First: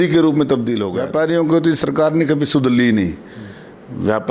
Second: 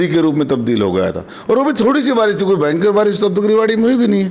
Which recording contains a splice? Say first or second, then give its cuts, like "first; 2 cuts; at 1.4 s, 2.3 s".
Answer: first; 1 cut; at 0.9 s